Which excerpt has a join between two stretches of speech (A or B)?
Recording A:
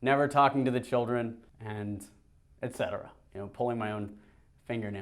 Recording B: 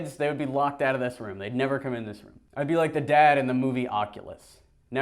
A